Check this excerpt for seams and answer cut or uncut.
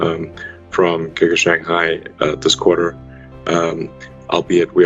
uncut